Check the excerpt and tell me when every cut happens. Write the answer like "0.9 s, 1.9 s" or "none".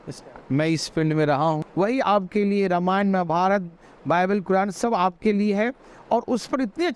1.7 s